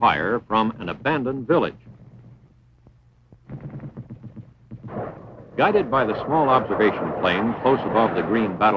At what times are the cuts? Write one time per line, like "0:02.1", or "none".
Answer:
0:01.6